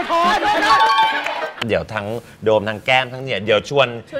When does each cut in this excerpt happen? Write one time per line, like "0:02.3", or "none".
0:01.6